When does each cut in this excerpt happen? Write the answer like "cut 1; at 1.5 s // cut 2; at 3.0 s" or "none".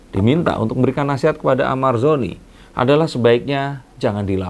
none